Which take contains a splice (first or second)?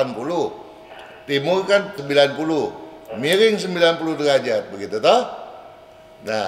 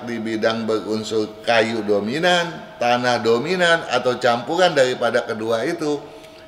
first